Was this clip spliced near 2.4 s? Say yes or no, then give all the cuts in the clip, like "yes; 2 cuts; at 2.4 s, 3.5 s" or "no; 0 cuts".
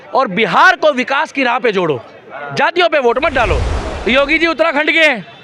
no; 1 cut; at 3.8 s